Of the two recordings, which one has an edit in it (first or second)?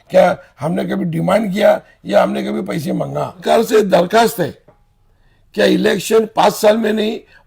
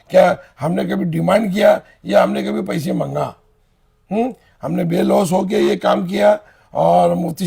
first